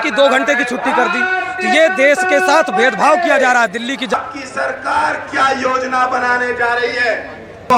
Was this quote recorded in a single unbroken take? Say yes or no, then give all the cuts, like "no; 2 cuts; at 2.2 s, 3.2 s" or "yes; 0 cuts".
no; 1 cut; at 4.1 s